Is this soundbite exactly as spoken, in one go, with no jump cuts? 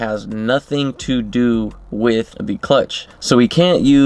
yes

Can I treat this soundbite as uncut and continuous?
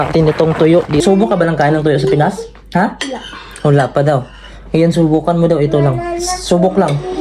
no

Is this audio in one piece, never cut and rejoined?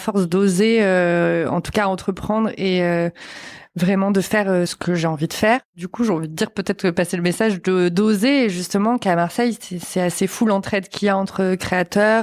no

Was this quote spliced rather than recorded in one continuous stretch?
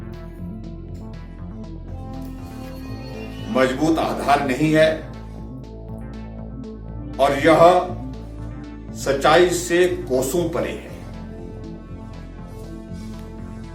no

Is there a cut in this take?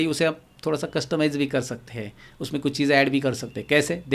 no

